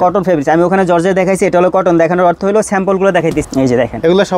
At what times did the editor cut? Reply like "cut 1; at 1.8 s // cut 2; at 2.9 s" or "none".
cut 1; at 3.4 s